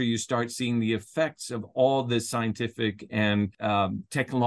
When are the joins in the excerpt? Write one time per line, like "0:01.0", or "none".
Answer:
none